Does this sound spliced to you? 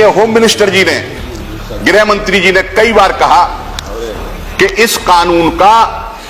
no; 0 cuts

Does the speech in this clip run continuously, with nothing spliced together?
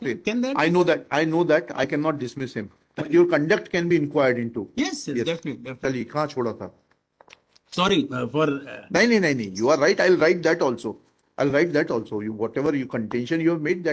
yes; 0 cuts

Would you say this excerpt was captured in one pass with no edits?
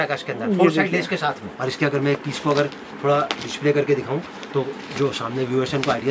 no; 1 cut; at 1.5 s

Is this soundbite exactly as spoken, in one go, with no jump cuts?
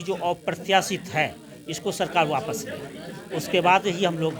yes; 0 cuts

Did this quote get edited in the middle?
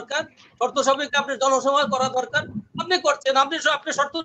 no; 0 cuts

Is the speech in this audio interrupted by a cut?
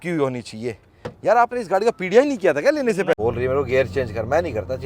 yes; 1 cut; at 3.2 s

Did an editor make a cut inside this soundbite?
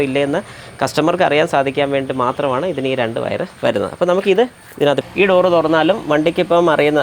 yes; 1 cut; at 5.0 s

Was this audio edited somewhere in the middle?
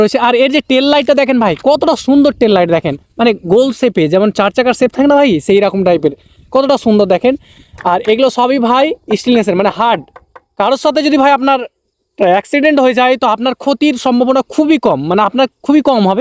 no; 0 cuts

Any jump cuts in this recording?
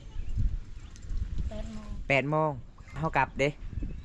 yes; 1 cut; at 3.0 s

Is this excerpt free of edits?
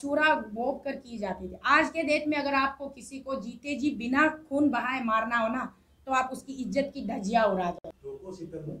no; 1 cut; at 7.9 s

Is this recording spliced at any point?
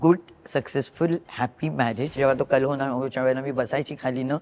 yes; 1 cut; at 2.2 s

